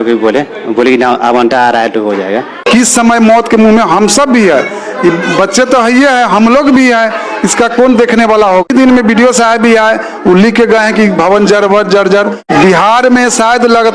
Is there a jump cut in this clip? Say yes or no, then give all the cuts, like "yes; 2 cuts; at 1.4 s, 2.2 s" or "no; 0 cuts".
yes; 3 cuts; at 2.5 s, 8.7 s, 12.4 s